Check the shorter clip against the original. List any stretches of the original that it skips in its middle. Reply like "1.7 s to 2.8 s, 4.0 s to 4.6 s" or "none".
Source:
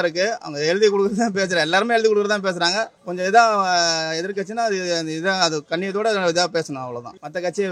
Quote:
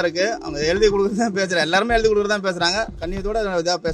3.0 s to 5.7 s